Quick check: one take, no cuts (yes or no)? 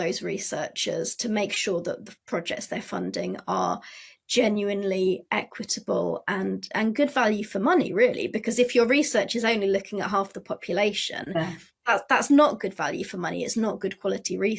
yes